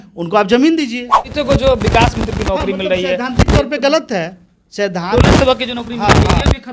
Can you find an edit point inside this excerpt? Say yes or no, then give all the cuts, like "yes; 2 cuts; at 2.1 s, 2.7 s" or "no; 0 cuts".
yes; 1 cut; at 1.3 s